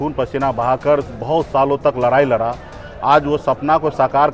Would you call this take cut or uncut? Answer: uncut